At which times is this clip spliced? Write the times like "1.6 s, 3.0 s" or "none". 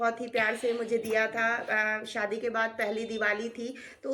none

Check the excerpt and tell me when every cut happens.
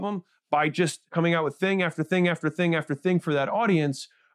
1.1 s

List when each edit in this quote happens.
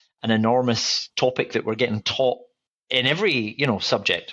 0.9 s

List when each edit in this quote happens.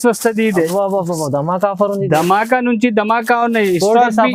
none

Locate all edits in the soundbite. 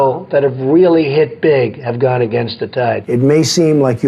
3.0 s

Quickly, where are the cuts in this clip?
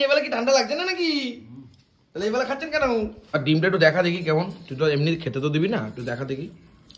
3.2 s

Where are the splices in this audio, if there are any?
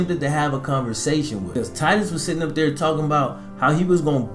1.5 s

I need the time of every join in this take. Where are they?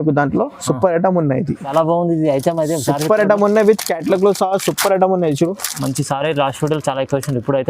1.7 s

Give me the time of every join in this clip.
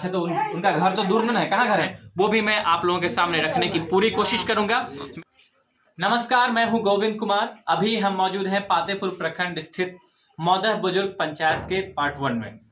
1.9 s, 5.1 s

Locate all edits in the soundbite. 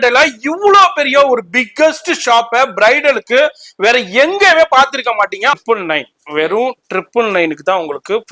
5.5 s

